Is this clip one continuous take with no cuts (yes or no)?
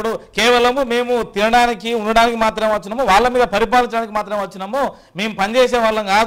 yes